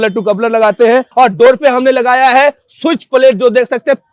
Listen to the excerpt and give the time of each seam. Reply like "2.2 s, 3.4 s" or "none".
1.1 s